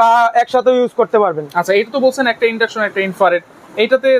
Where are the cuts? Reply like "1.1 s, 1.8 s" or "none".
none